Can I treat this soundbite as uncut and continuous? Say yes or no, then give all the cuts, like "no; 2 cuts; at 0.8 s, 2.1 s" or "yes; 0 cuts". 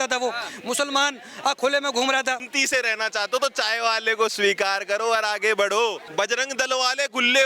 no; 2 cuts; at 2.5 s, 6.0 s